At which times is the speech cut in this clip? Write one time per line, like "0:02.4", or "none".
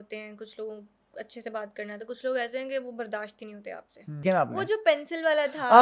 0:04.2